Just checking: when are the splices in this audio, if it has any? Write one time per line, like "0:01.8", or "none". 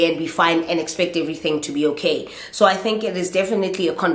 none